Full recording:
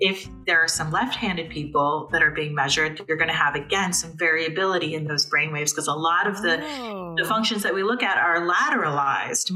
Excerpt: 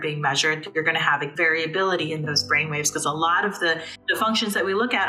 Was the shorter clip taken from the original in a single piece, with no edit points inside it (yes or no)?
no